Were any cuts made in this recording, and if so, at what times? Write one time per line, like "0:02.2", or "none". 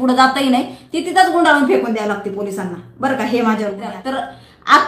0:03.9

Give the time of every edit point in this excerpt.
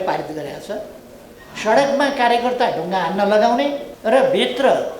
0:03.9

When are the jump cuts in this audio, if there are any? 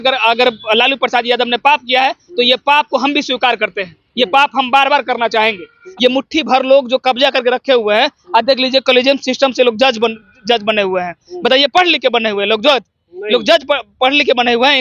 0:05.8

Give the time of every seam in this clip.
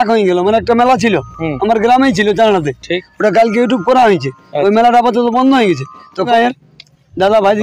0:06.3

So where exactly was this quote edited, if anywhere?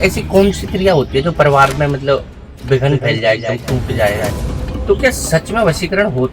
0:04.4

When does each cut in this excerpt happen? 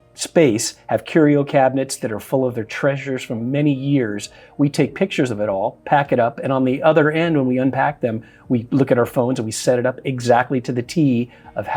none

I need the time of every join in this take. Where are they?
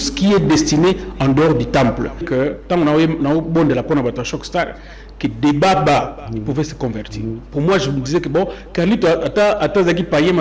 0:02.3

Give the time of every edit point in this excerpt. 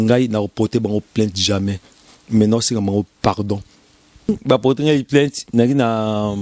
0:04.3

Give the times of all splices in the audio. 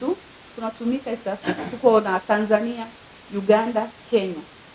none

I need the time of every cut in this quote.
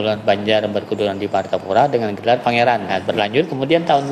0:02.9

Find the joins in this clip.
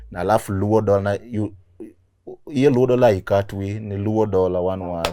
none

